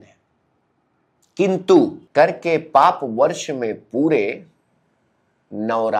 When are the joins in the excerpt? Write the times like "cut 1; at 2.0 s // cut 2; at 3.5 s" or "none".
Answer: cut 1; at 2.0 s